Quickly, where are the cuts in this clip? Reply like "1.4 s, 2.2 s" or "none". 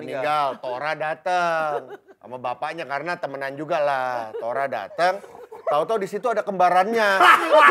none